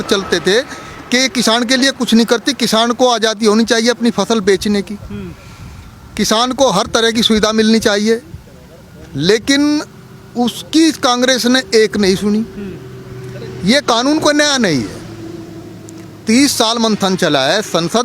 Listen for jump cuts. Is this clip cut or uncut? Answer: uncut